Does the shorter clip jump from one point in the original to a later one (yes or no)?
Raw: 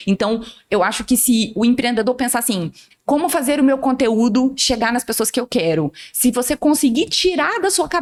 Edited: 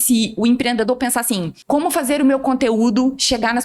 yes